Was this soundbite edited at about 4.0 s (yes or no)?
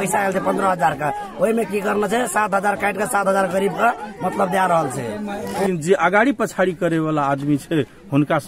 no